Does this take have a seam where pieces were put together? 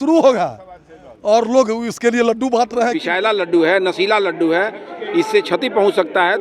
yes; 1 cut; at 3.0 s

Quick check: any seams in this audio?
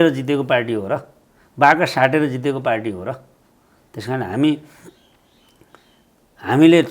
no; 0 cuts

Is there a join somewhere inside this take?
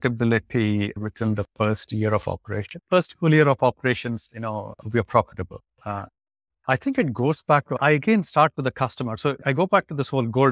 yes; 3 cuts; at 1.0 s, 7.8 s, 9.4 s

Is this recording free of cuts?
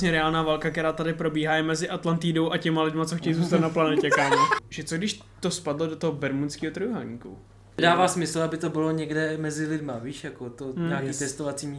no; 2 cuts; at 4.6 s, 7.8 s

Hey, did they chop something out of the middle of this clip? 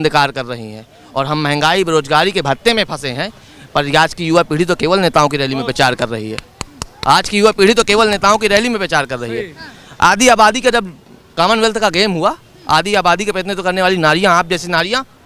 no; 0 cuts

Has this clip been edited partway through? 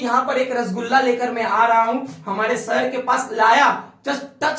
no; 0 cuts

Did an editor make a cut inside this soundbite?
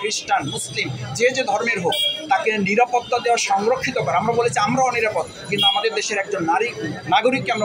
no; 0 cuts

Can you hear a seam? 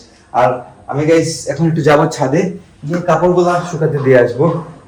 no; 0 cuts

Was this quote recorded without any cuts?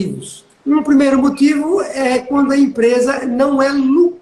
yes; 0 cuts

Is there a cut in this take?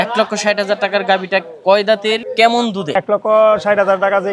yes; 2 cuts; at 2.3 s, 3.0 s

